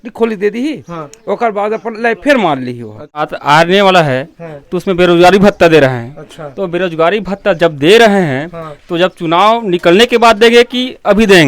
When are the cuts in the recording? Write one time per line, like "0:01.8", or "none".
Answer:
0:03.2